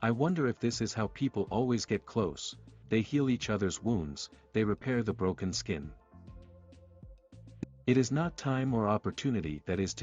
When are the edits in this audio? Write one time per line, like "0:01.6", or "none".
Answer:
0:06.2
0:07.6

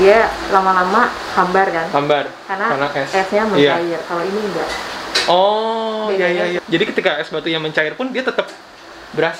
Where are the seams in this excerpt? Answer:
0:06.6

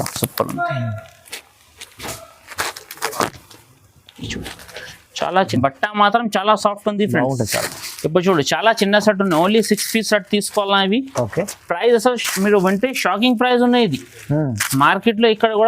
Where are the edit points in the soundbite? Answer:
0:05.5

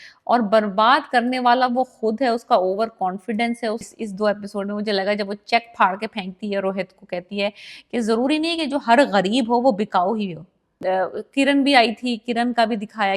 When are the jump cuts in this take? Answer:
0:03.9
0:10.7

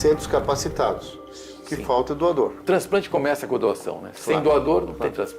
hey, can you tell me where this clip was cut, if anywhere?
0:02.6

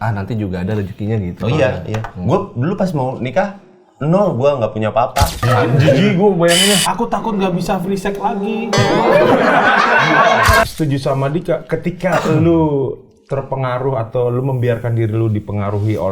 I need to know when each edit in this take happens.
0:05.5
0:10.7

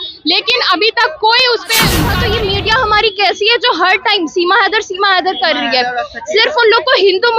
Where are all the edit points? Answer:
0:02.1

